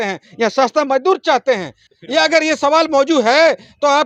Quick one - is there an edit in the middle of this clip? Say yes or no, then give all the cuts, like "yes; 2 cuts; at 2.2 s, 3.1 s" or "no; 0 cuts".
yes; 1 cut; at 1.8 s